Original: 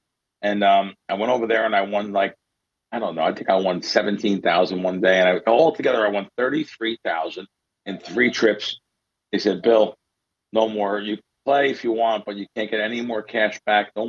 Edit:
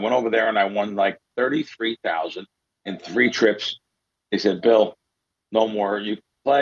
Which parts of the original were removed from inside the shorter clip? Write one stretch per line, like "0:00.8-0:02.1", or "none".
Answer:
0:02.5-0:06.3